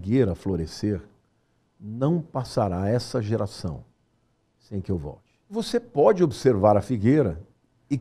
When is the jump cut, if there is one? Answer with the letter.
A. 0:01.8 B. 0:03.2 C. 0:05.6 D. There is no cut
C